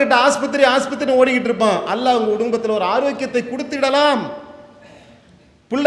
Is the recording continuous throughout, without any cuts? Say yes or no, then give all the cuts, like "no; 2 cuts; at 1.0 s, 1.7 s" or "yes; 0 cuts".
yes; 0 cuts